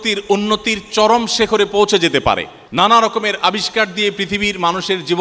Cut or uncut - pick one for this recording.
cut